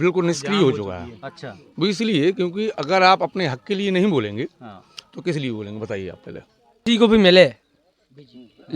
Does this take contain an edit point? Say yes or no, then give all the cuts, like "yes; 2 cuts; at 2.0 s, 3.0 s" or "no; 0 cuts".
yes; 1 cut; at 6.8 s